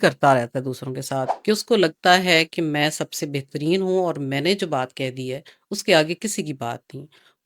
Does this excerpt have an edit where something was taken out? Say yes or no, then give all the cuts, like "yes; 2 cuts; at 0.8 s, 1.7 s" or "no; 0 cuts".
yes; 1 cut; at 1.3 s